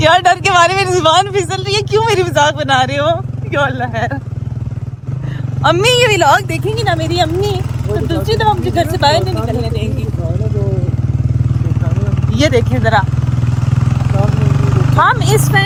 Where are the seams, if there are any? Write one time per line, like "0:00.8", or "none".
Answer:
none